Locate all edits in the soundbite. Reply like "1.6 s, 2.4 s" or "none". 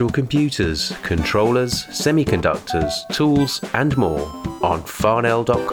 none